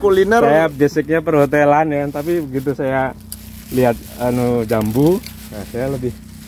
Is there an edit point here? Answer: no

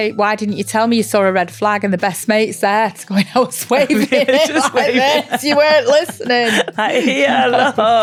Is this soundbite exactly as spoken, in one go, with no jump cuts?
yes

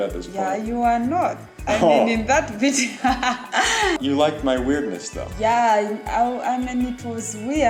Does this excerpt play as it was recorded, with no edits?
yes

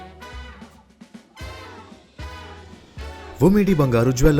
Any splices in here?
yes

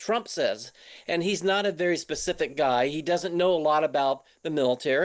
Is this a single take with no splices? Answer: yes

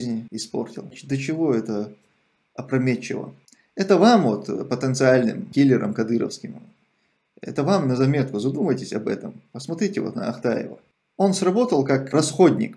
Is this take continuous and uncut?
yes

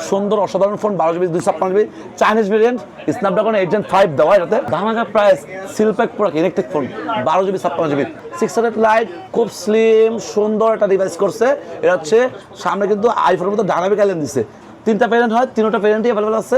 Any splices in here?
yes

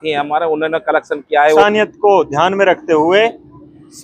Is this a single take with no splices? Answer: no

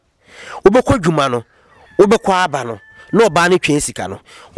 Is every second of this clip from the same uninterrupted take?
yes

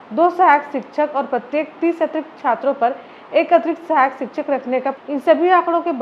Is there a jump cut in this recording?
yes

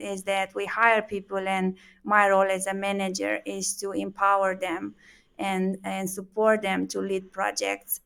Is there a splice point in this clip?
no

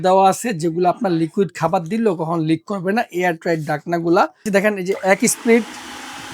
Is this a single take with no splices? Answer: no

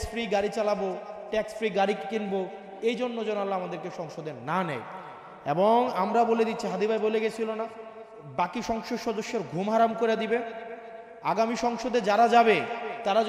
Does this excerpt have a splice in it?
no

